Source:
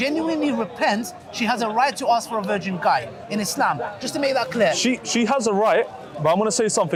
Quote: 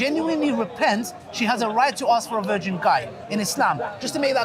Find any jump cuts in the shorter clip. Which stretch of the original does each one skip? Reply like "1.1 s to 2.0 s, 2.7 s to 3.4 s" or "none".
none